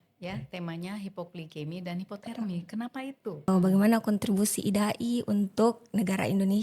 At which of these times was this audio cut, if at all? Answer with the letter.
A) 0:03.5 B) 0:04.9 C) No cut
A